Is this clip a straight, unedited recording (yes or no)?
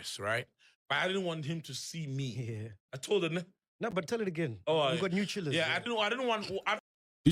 yes